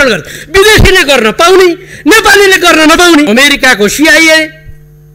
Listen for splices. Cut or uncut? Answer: cut